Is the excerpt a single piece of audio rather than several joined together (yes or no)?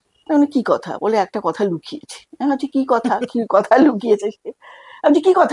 yes